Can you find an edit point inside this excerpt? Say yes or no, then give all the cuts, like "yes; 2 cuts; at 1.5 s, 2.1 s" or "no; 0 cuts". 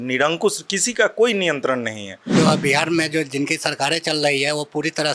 yes; 1 cut; at 2.3 s